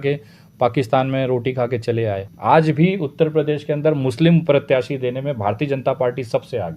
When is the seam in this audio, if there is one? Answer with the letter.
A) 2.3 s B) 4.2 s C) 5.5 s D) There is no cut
A